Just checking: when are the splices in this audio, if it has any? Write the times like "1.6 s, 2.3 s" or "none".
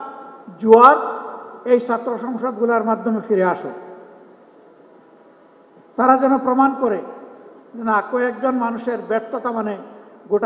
none